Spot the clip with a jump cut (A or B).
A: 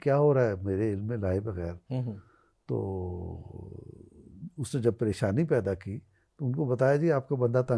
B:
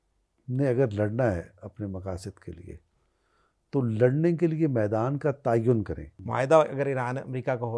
B